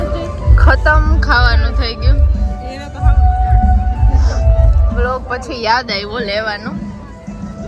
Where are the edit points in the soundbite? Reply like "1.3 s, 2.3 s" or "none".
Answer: none